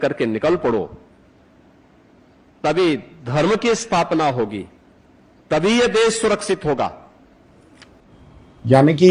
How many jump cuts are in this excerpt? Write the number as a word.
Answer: zero